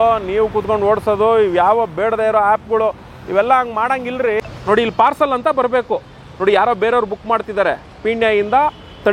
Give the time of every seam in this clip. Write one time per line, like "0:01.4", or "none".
0:04.4